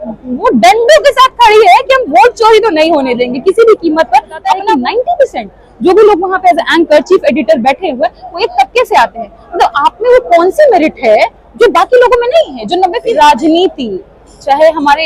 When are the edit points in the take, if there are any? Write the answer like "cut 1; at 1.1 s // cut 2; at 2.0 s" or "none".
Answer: cut 1; at 4.6 s // cut 2; at 13.0 s